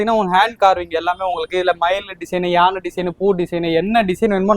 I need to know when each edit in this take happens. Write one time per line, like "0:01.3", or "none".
none